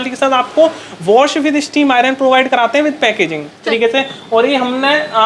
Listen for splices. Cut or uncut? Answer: cut